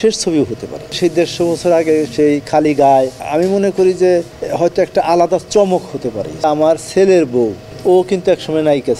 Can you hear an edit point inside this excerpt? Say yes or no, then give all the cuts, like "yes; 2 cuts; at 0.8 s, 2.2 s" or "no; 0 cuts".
yes; 5 cuts; at 1.0 s, 3.2 s, 4.4 s, 6.4 s, 7.7 s